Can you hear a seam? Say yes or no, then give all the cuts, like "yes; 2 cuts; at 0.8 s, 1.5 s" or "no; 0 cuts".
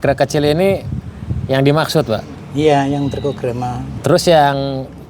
yes; 1 cut; at 3.8 s